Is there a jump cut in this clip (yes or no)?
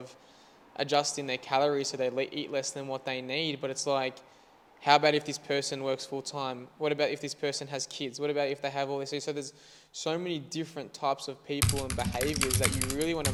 no